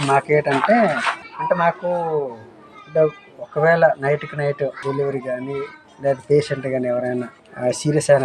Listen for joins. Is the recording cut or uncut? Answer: cut